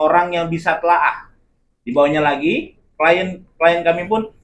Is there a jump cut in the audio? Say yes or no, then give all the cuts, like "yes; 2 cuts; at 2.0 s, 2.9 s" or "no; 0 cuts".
no; 0 cuts